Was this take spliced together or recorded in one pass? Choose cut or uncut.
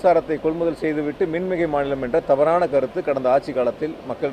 uncut